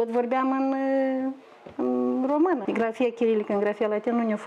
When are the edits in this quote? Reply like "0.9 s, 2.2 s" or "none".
2.6 s